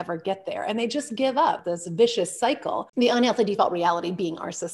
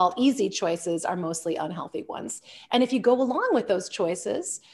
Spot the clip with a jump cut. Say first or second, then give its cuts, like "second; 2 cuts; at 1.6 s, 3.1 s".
first; 2 cuts; at 1.7 s, 2.8 s